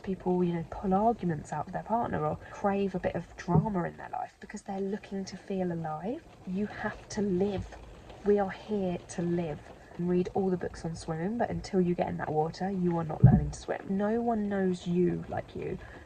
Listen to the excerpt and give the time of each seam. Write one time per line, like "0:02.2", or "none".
0:02.5
0:06.3
0:09.9
0:13.8